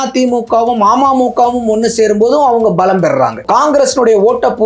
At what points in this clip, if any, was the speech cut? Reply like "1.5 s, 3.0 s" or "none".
3.4 s